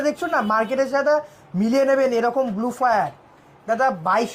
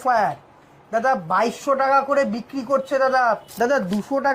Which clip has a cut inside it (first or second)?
second